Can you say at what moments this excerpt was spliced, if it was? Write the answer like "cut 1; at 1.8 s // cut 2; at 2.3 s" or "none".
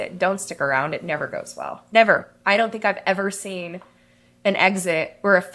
none